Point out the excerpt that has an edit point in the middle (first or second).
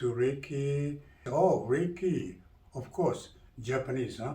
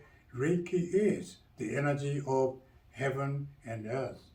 first